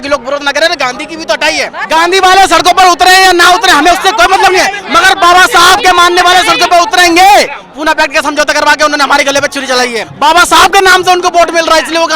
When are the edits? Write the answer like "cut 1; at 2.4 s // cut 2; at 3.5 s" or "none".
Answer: cut 1; at 1.8 s // cut 2; at 7.7 s // cut 3; at 10.0 s